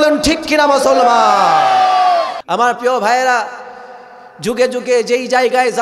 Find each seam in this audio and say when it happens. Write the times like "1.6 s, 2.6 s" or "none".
2.4 s

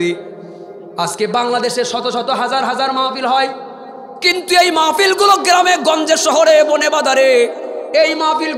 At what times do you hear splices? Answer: none

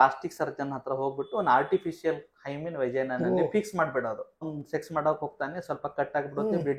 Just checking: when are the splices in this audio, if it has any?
4.6 s

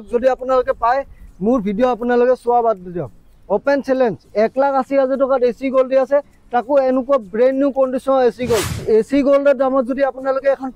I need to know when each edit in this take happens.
8.8 s

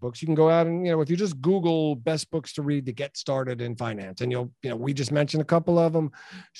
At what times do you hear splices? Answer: none

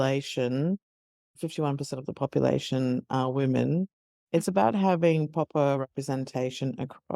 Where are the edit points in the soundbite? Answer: none

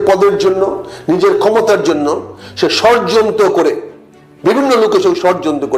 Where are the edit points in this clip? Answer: none

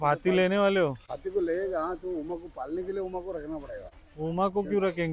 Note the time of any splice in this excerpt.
none

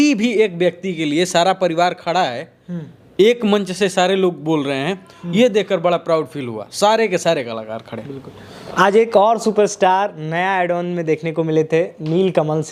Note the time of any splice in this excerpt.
none

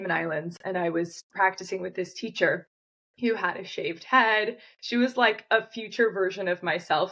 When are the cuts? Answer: 1.2 s

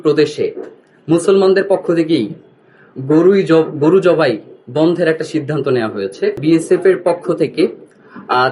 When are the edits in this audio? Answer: 6.4 s

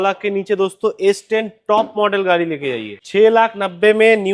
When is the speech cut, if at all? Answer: 2.9 s

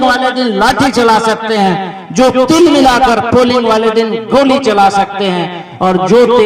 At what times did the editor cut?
none

